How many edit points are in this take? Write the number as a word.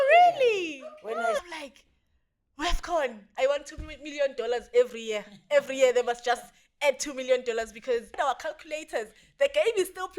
three